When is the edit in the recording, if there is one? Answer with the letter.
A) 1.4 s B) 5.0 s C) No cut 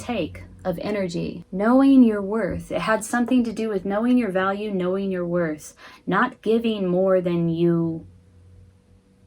A